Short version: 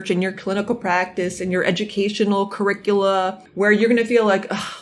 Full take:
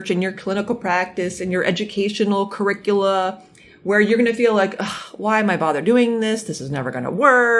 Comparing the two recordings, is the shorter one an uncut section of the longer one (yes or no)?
no